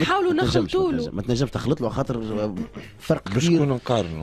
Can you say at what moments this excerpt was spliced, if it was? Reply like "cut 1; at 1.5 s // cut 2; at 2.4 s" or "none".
none